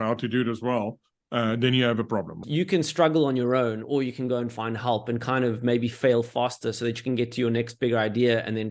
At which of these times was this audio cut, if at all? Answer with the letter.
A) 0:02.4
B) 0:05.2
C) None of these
A